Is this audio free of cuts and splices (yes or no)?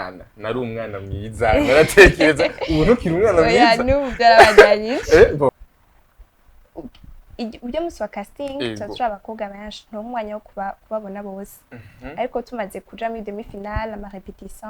no